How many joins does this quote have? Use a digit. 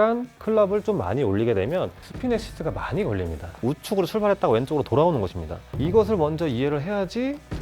1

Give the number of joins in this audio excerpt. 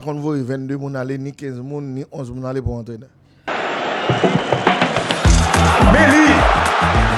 1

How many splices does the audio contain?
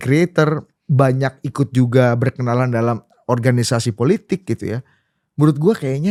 0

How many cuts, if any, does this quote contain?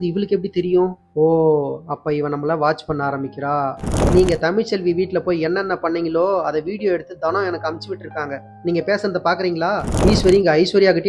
2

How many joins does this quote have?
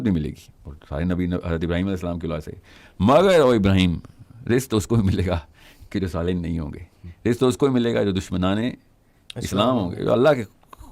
0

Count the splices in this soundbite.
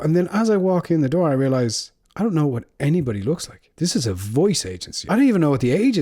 1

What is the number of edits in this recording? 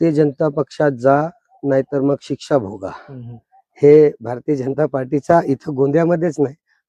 0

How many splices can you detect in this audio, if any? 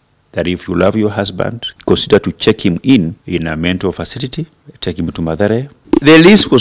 4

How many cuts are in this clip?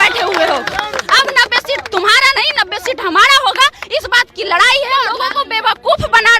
1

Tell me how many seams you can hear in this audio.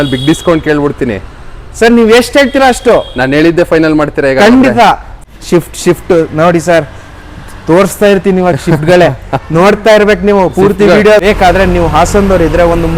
2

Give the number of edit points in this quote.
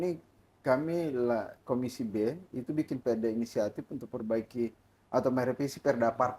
0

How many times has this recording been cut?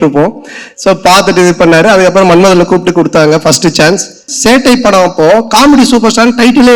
1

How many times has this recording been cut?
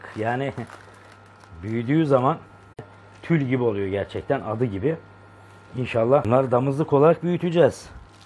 2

